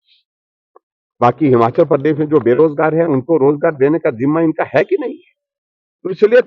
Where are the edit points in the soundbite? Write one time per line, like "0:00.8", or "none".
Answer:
none